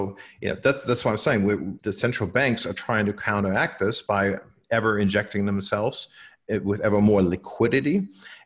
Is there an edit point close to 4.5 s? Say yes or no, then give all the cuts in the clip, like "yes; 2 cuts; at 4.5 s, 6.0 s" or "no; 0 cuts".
yes; 2 cuts; at 1.8 s, 4.5 s